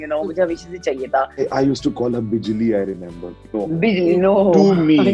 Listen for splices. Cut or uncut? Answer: cut